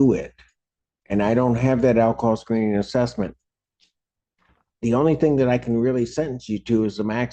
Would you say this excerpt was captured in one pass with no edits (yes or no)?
yes